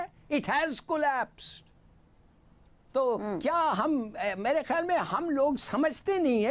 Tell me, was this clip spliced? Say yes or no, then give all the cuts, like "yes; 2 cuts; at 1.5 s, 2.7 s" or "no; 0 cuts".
no; 0 cuts